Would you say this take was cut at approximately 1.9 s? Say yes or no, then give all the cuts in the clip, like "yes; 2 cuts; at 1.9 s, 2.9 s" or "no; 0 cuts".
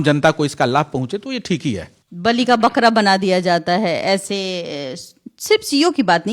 no; 0 cuts